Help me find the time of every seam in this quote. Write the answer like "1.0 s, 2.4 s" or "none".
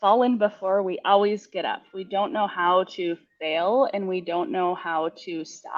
none